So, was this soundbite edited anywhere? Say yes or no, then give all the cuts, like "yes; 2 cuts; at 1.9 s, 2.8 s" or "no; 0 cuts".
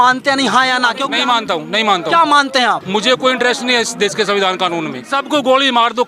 yes; 3 cuts; at 1.0 s, 2.8 s, 5.0 s